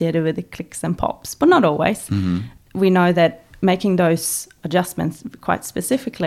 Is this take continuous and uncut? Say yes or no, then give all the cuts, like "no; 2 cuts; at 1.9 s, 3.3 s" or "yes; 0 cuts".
no; 1 cut; at 2.5 s